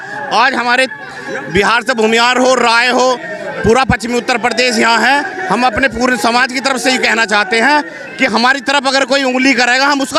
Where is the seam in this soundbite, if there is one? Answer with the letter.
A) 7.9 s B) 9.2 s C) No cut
C